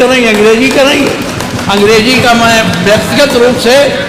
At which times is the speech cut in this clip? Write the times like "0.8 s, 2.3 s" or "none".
none